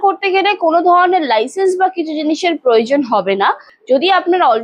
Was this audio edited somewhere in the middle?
yes; 1 cut; at 3.7 s

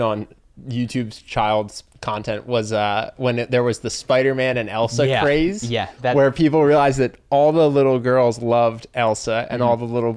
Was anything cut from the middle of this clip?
no; 0 cuts

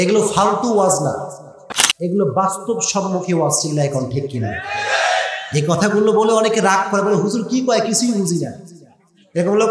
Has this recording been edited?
no; 0 cuts

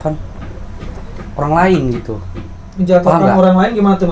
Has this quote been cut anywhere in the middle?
no; 0 cuts

